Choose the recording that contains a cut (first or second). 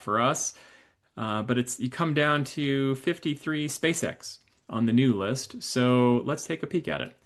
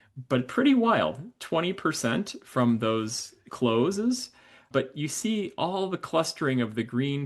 second